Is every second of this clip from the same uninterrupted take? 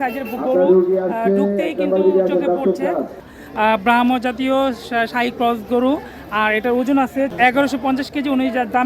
no; 2 cuts; at 3.3 s, 7.3 s

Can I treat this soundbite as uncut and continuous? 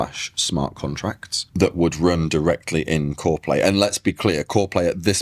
yes; 0 cuts

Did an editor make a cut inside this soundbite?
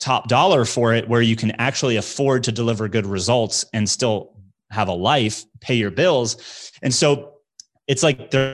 no; 0 cuts

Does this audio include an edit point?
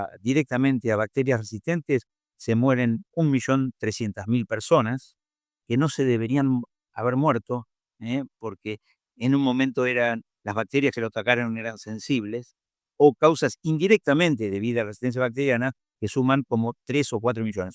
no; 0 cuts

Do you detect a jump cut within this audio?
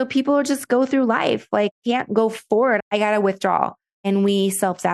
yes; 3 cuts; at 1.8 s, 2.8 s, 3.9 s

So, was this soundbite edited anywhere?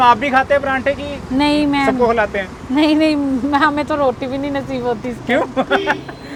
no; 0 cuts

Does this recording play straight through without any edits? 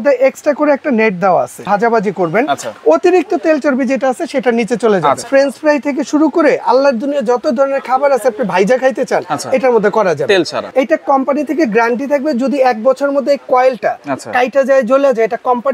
no; 3 cuts; at 1.7 s, 5.2 s, 10.6 s

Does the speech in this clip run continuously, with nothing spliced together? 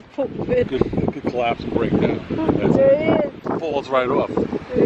no; 1 cut; at 3.4 s

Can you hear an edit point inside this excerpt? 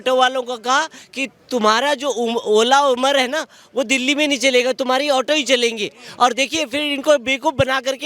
no; 0 cuts

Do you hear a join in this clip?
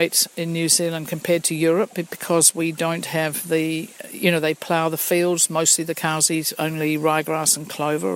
no; 0 cuts

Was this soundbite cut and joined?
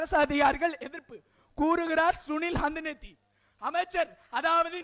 no; 0 cuts

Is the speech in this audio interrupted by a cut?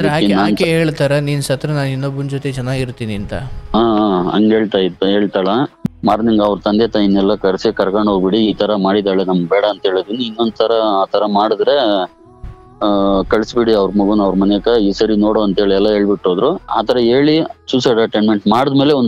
yes; 1 cut; at 5.8 s

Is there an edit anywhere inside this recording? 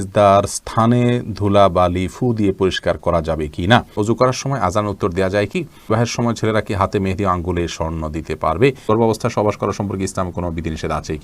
yes; 3 cuts; at 3.9 s, 5.9 s, 8.9 s

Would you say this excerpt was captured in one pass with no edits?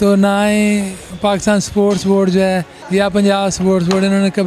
no; 2 cuts; at 1.0 s, 2.7 s

